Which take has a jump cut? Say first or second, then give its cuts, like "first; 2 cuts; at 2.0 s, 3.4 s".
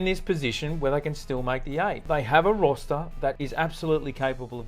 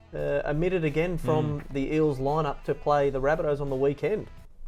first; 2 cuts; at 2.0 s, 3.4 s